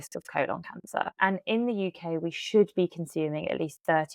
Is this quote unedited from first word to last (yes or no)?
no